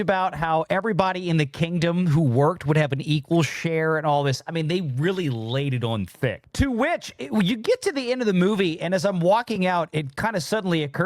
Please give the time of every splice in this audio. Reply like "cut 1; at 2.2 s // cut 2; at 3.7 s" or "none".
none

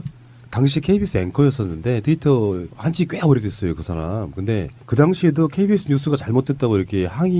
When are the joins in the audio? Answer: cut 1; at 5.6 s

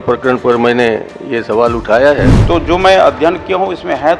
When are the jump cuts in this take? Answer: cut 1; at 2.4 s

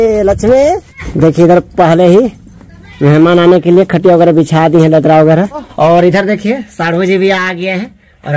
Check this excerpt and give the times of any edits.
cut 1; at 1.0 s // cut 2; at 5.7 s

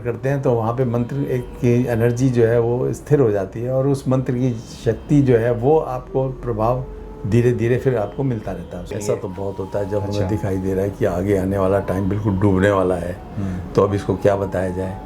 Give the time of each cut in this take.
cut 1; at 8.8 s

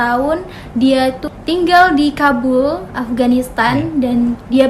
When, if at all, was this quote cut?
cut 1; at 1.3 s

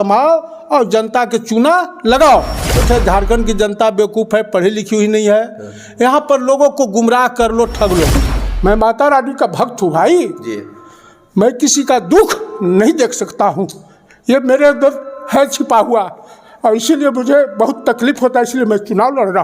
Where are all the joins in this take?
cut 1; at 2.8 s // cut 2; at 8.3 s

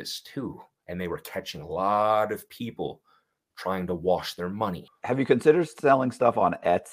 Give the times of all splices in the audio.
cut 1; at 4.9 s

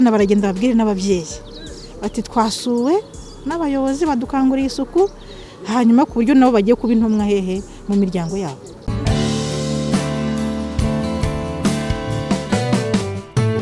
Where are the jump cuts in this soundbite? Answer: cut 1; at 8.8 s

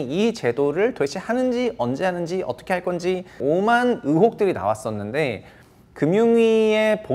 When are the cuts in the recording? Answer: cut 1; at 3.4 s

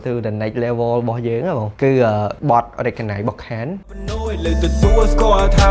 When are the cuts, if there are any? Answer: none

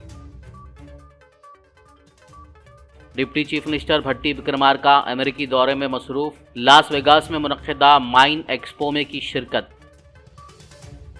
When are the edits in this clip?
none

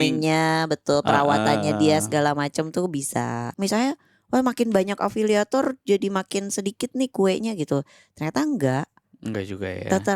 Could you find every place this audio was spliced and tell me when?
cut 1; at 3.5 s

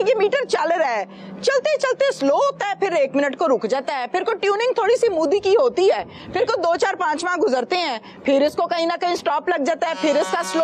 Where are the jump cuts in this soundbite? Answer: none

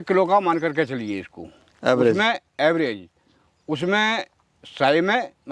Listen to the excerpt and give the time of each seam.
none

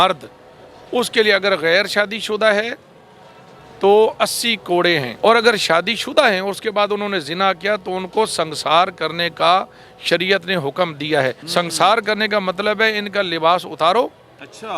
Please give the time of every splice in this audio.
cut 1; at 5.1 s // cut 2; at 11.4 s

